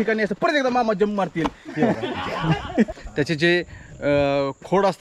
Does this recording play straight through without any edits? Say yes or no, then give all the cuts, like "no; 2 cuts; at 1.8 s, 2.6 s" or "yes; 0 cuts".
no; 1 cut; at 2.9 s